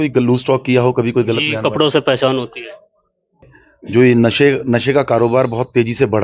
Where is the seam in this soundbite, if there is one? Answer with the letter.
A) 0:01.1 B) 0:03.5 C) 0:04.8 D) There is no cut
B